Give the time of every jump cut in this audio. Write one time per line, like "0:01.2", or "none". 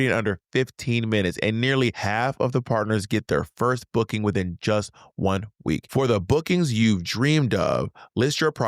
0:02.0
0:05.8